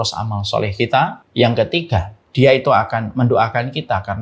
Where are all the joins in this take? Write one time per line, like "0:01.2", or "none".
0:01.2
0:02.2